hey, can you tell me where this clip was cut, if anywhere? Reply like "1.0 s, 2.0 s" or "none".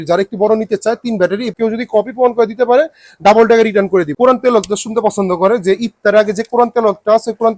1.5 s, 4.1 s